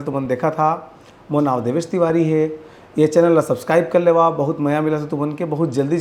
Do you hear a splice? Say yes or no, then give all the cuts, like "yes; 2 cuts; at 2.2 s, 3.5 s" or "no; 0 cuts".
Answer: no; 0 cuts